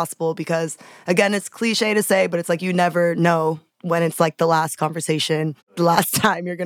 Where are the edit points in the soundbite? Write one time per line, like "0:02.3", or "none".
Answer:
0:03.7
0:05.7